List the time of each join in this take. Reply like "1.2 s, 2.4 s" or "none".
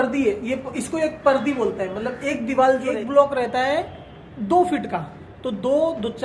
2.9 s

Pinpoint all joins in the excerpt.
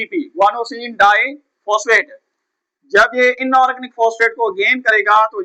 none

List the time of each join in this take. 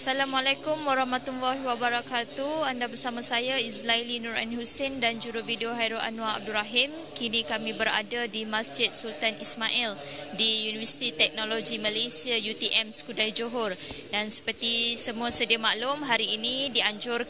3.4 s

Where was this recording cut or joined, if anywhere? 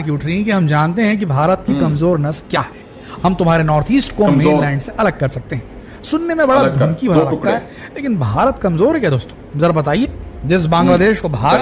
none

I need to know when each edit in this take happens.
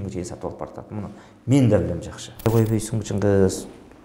2.5 s

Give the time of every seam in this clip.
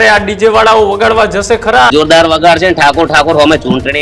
1.9 s

